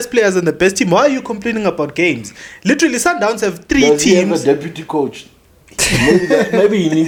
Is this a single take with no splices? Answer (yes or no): yes